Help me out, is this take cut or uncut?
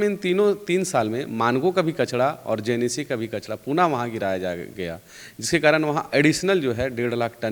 uncut